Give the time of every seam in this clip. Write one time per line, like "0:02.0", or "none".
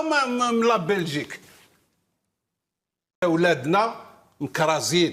0:03.2